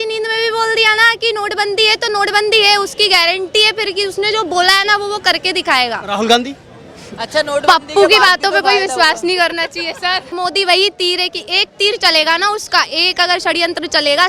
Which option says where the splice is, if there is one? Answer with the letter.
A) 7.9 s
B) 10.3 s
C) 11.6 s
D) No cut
B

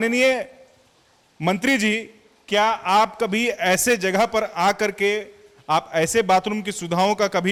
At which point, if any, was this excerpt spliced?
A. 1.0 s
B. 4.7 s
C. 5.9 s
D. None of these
D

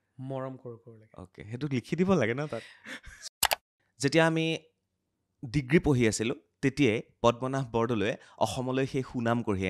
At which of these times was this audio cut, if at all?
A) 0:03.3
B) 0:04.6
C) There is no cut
A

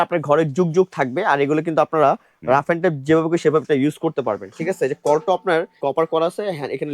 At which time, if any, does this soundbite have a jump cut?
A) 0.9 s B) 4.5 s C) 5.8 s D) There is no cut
C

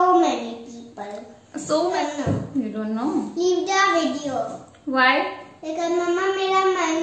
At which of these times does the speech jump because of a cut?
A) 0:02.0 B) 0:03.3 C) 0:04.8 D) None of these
A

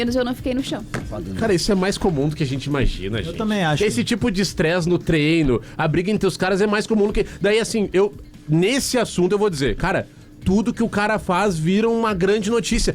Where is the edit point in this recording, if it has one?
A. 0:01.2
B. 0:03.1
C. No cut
A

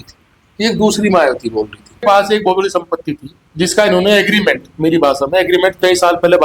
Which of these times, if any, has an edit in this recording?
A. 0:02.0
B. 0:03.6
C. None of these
A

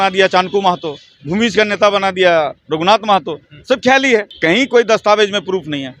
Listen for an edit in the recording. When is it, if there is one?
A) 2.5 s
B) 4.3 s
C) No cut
B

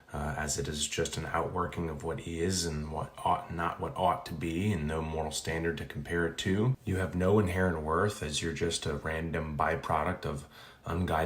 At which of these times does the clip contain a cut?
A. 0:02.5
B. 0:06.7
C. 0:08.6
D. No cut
B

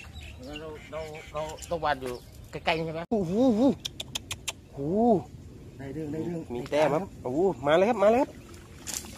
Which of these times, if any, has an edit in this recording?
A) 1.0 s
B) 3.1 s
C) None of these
B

